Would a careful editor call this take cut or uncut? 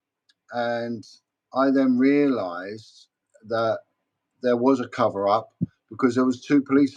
uncut